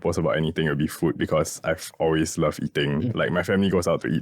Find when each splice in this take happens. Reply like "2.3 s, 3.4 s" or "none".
none